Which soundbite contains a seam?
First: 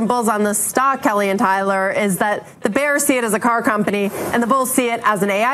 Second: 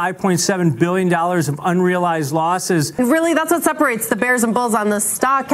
second; 1 cut; at 2.9 s

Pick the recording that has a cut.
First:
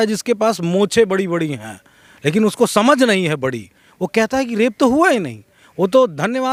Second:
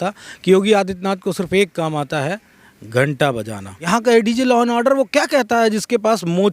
second; 1 cut; at 3.9 s

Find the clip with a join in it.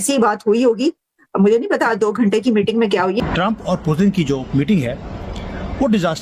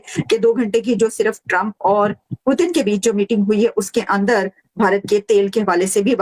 first; 1 cut; at 3.2 s

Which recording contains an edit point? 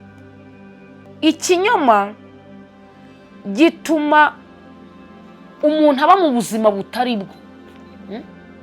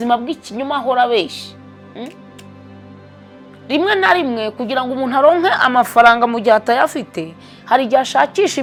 first; 1 cut; at 1.1 s

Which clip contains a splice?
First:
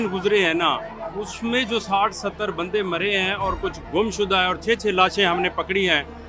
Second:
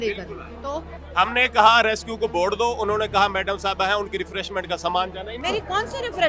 second; 2 cuts; at 1.0 s, 5.3 s

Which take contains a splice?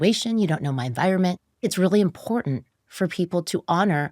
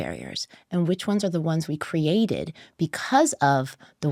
first; 1 cut; at 1.7 s

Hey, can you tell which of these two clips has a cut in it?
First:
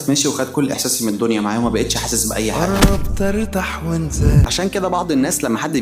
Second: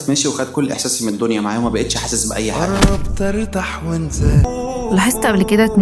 second; 1 cut; at 4.5 s

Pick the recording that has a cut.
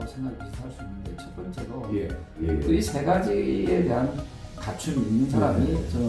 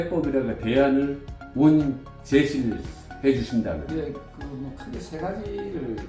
first; 1 cut; at 2.7 s

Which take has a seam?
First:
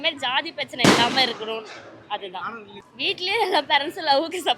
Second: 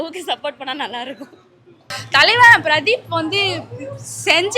second; 1 cut; at 1.8 s

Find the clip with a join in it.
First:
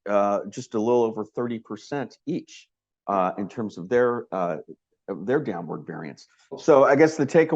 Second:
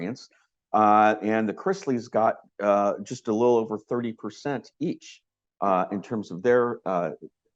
first; 1 cut; at 6.6 s

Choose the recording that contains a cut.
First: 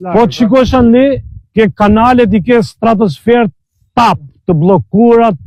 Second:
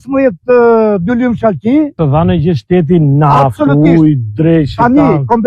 second; 1 cut; at 1.9 s

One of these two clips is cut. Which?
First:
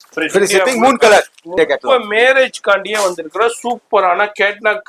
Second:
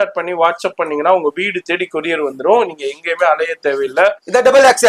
first; 1 cut; at 1.4 s

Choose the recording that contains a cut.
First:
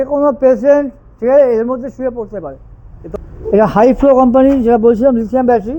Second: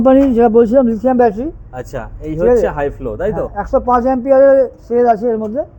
first; 1 cut; at 3.2 s

